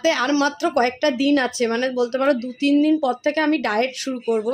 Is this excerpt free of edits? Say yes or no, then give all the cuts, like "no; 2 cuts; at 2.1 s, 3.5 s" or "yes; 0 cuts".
yes; 0 cuts